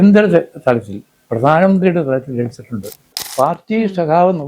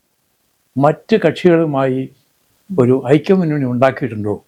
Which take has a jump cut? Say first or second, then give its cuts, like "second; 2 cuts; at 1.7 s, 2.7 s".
first; 1 cut; at 3.1 s